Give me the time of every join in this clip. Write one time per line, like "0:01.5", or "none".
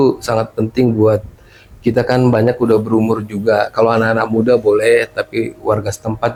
none